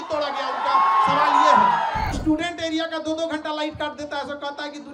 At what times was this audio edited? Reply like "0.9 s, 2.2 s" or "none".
2.1 s